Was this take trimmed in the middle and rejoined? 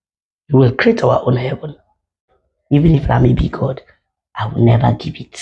yes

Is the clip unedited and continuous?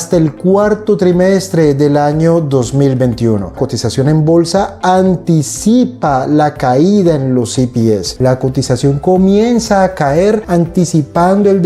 no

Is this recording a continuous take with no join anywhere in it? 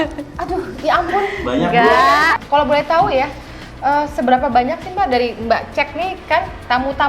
no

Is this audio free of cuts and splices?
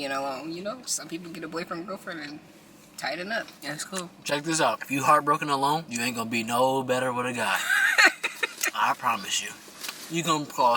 no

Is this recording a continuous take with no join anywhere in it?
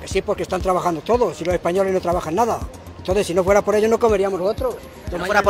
yes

